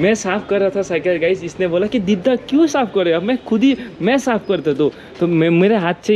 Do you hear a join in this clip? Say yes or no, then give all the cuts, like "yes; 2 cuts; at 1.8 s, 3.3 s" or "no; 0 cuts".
no; 0 cuts